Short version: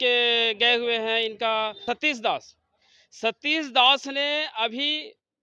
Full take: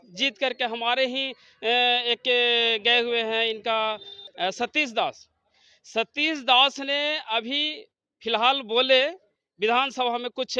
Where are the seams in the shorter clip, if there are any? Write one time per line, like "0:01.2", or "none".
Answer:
0:01.8